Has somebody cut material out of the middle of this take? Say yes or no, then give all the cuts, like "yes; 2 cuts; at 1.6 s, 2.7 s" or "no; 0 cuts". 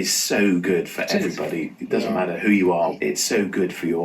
yes; 1 cut; at 2.9 s